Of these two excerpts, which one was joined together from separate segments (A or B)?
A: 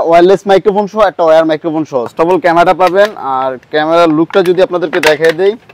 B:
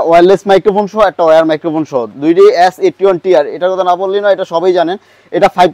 A